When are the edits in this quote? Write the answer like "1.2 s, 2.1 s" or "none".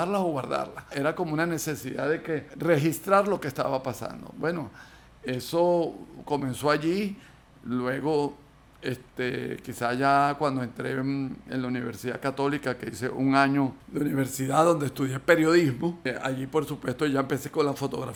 none